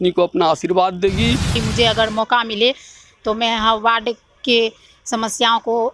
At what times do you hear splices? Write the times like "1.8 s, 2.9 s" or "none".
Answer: 1.5 s